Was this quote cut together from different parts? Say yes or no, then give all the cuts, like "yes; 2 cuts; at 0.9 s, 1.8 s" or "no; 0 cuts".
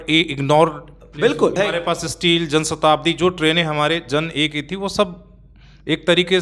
yes; 1 cut; at 1.6 s